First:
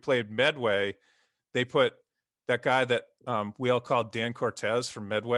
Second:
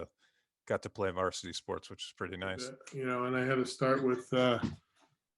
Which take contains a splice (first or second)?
second